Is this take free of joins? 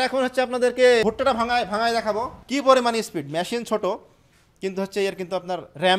no; 2 cuts; at 1.0 s, 2.3 s

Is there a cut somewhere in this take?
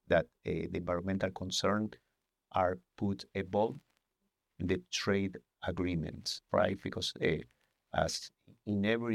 no; 0 cuts

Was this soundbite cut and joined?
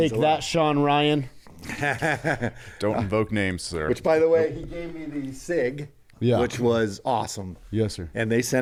no; 0 cuts

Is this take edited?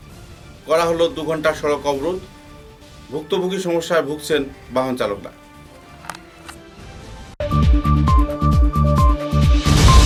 no; 0 cuts

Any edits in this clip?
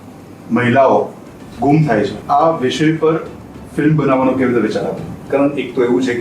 yes; 2 cuts; at 2.2 s, 5.1 s

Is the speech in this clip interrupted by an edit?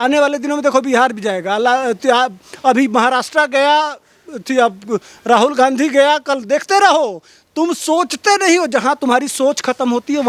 no; 0 cuts

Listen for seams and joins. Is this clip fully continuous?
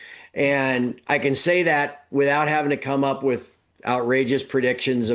yes; 0 cuts

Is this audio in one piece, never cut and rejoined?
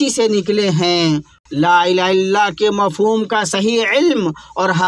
no; 1 cut; at 1.3 s

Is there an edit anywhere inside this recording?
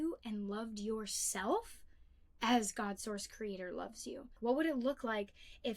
yes; 1 cut; at 4.3 s

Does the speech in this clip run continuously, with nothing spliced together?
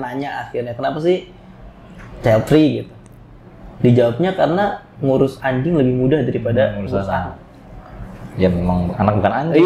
yes; 0 cuts

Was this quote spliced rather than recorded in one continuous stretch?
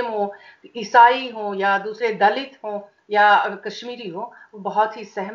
no; 0 cuts

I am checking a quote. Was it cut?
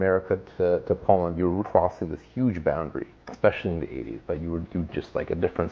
yes; 2 cuts; at 1.6 s, 3.2 s

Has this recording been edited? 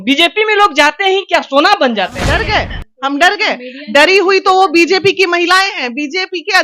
yes; 1 cut; at 2.4 s

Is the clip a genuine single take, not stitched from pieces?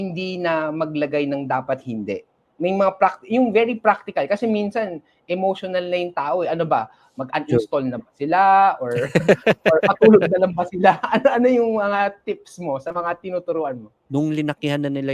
no; 1 cut; at 14.0 s

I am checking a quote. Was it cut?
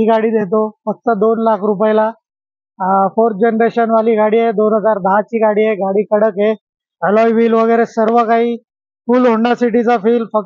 no; 0 cuts

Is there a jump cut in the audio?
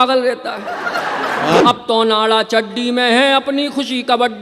yes; 1 cut; at 1.6 s

